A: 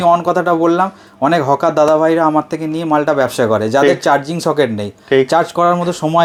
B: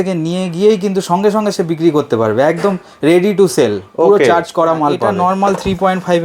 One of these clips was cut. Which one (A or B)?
B